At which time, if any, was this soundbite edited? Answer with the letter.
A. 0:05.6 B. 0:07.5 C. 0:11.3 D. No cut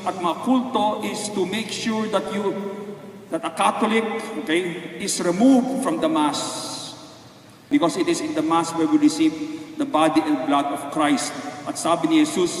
B